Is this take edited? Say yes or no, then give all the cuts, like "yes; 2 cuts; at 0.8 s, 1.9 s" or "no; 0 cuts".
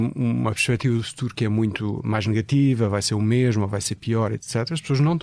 no; 0 cuts